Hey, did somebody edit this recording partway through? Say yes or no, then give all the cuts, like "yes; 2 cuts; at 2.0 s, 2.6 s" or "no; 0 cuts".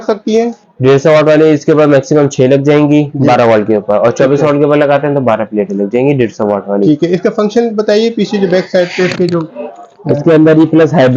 no; 0 cuts